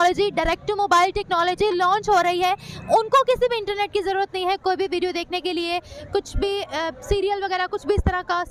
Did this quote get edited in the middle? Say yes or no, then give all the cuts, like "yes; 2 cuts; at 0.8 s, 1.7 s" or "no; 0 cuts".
no; 0 cuts